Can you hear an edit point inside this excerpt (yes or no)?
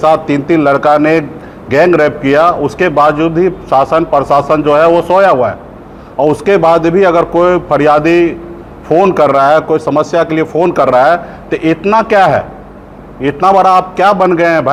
no